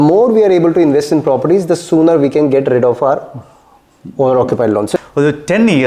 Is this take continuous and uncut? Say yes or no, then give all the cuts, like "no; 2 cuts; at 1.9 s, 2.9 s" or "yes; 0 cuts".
no; 1 cut; at 4.9 s